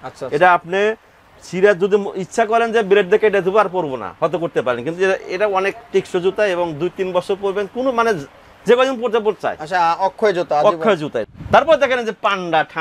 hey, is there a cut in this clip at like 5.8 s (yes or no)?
no